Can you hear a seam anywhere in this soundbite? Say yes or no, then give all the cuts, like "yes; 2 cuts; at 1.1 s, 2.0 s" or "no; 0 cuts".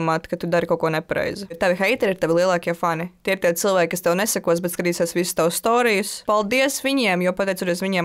yes; 2 cuts; at 1.6 s, 6.2 s